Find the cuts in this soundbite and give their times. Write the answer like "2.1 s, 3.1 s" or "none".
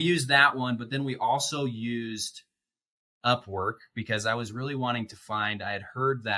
none